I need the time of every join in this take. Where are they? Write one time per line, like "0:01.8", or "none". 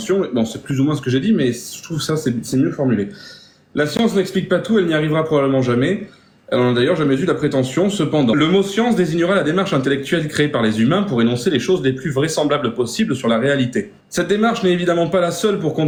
none